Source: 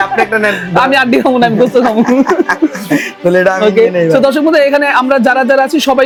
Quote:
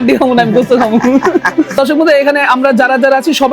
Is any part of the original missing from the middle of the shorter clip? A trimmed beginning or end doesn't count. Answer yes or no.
yes